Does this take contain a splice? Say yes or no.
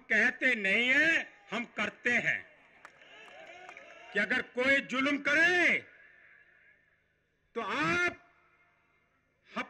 yes